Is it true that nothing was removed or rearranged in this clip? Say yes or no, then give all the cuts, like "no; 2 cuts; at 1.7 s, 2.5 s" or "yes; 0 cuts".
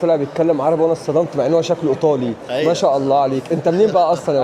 yes; 0 cuts